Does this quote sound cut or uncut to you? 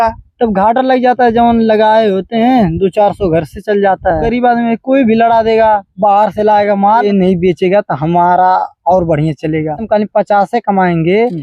cut